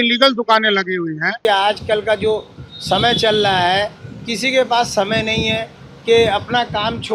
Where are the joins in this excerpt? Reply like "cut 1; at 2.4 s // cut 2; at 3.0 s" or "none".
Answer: cut 1; at 1.4 s